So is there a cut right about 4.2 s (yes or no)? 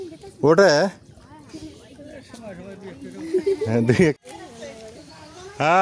yes